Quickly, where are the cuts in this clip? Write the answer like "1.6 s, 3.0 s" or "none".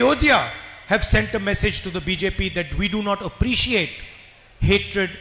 none